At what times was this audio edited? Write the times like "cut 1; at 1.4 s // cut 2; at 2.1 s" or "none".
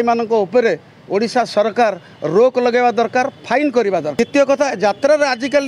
cut 1; at 4.1 s

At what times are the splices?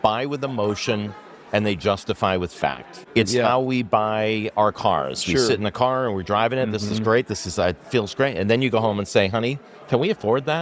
cut 1; at 2.9 s

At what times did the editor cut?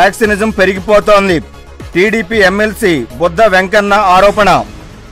none

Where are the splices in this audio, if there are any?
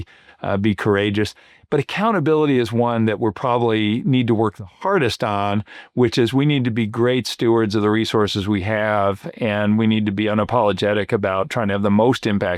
none

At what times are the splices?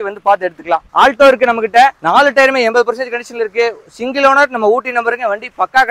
cut 1; at 0.9 s // cut 2; at 2.0 s

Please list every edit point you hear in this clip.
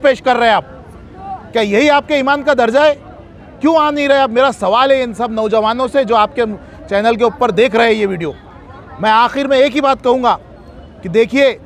none

